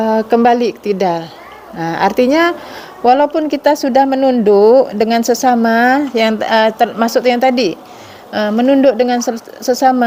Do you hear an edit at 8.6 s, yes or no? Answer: no